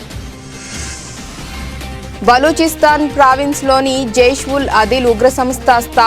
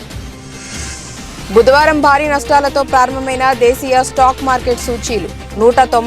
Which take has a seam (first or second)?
first